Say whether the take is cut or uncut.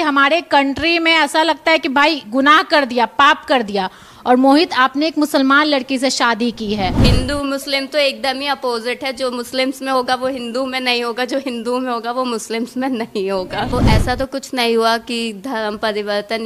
cut